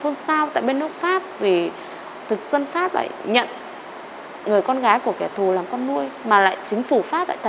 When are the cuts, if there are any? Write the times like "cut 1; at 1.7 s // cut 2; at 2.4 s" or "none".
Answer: none